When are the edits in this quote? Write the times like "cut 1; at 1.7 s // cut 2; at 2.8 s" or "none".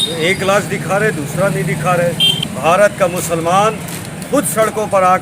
cut 1; at 2.3 s